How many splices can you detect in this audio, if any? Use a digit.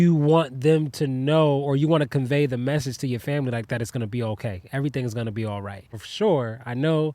1